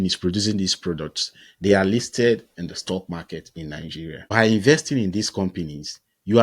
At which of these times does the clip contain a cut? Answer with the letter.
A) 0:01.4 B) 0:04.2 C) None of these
B